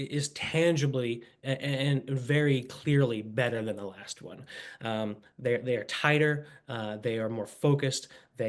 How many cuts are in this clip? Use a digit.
0